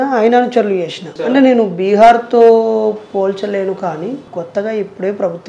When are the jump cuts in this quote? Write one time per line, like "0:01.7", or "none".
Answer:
0:01.1
0:04.2